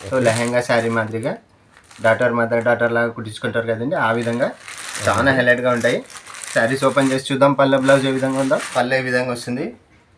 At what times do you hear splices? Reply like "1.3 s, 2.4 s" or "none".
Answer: 8.7 s